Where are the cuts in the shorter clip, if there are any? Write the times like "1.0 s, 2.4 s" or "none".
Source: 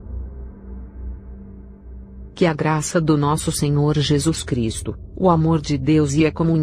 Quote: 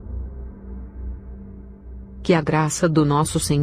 2.2 s